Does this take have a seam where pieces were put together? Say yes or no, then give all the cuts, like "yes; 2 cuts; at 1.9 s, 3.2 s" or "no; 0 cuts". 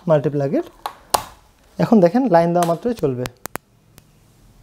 no; 0 cuts